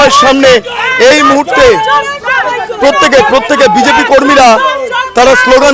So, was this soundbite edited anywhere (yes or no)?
no